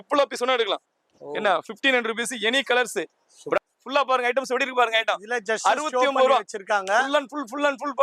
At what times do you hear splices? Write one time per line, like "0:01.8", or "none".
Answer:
0:03.6